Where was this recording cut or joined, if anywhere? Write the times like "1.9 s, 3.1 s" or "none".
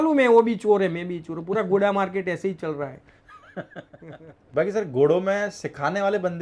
4.0 s